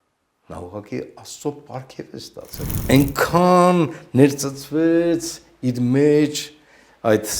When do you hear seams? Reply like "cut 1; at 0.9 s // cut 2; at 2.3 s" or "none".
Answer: cut 1; at 2.6 s

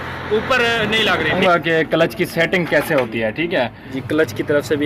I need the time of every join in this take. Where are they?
cut 1; at 1.4 s // cut 2; at 3.9 s

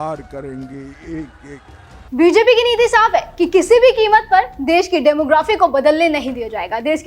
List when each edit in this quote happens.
none

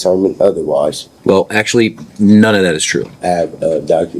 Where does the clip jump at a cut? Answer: cut 1; at 1.1 s // cut 2; at 3.1 s

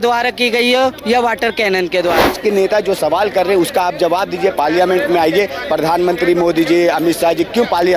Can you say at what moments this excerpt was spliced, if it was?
cut 1; at 2.3 s

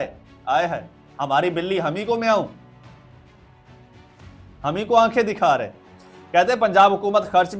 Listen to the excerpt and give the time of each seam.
none

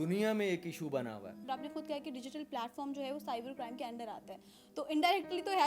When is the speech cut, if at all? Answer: cut 1; at 1.5 s

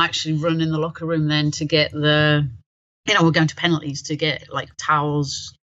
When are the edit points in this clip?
none

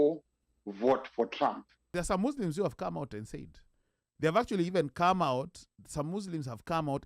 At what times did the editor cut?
cut 1; at 1.9 s

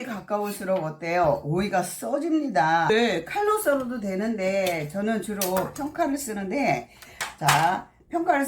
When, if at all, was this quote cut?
cut 1; at 2.9 s

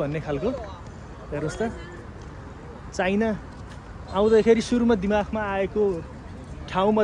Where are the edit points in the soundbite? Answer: none

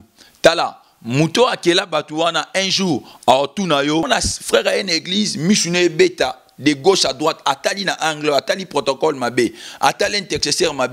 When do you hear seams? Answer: cut 1; at 4.1 s

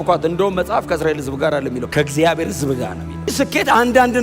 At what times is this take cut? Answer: cut 1; at 1.8 s // cut 2; at 3.2 s

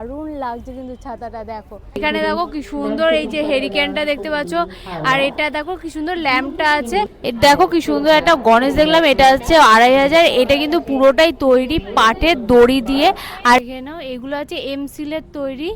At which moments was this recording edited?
cut 1; at 2.0 s // cut 2; at 7.2 s // cut 3; at 13.6 s

